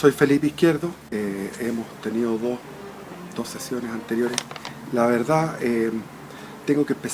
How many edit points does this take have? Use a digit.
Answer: 1